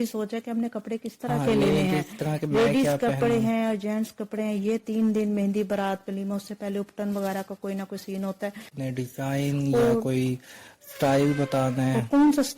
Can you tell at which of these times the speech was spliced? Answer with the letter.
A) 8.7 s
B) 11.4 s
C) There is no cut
A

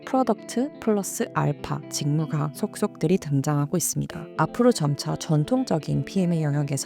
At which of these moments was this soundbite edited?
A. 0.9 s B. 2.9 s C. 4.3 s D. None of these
C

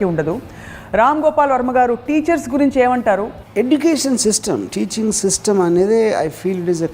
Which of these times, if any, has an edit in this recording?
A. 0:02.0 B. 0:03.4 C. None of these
B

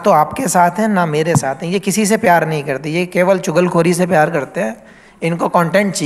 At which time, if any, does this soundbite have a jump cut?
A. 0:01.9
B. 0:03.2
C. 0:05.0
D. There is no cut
D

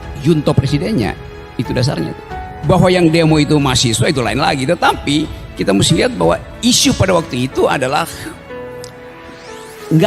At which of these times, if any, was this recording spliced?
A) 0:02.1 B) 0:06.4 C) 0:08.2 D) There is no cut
D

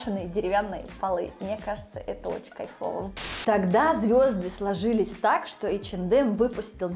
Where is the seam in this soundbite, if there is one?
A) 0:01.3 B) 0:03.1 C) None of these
B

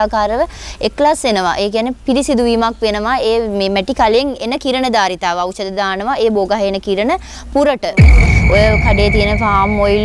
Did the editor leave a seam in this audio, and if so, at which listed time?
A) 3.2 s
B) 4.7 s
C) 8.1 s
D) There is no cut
C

